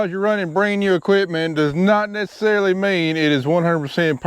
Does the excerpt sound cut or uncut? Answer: uncut